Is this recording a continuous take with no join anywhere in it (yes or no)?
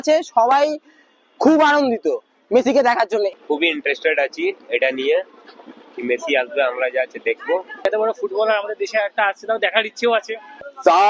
yes